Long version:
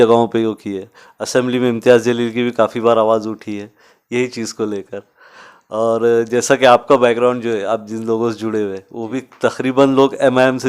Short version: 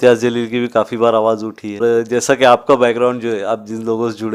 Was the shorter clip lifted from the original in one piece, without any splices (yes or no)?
no